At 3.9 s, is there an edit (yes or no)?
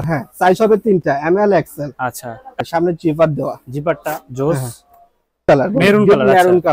no